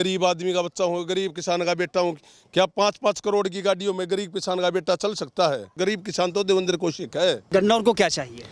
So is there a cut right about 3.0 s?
no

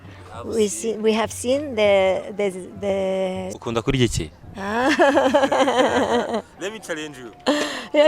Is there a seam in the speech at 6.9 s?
no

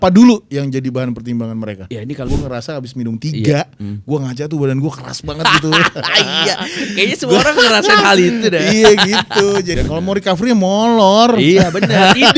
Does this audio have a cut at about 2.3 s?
yes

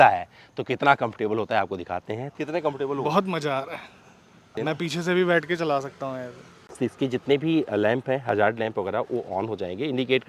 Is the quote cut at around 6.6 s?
yes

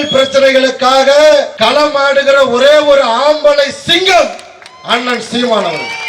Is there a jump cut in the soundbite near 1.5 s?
yes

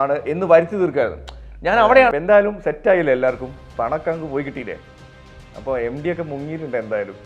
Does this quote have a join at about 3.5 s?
no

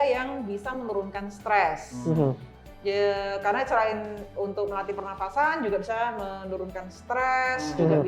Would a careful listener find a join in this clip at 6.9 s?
no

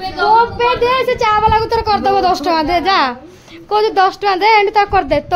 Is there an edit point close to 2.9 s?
no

